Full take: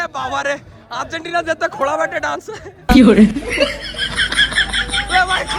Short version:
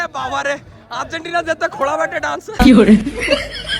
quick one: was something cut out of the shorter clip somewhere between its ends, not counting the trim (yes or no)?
yes